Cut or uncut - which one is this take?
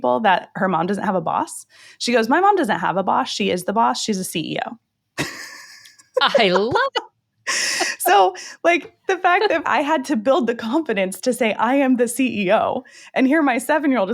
cut